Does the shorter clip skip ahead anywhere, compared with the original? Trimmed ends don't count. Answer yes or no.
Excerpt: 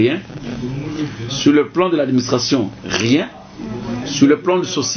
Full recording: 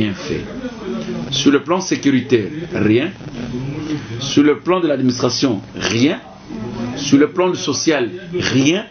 no